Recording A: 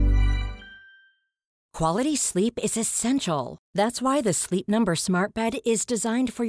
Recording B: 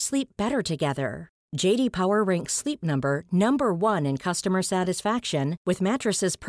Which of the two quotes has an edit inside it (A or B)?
A